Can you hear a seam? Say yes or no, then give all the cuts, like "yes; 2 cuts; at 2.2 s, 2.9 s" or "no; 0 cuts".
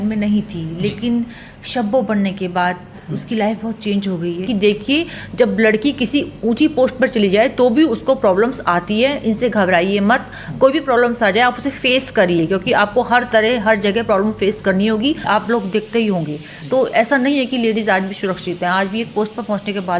yes; 2 cuts; at 4.4 s, 15.2 s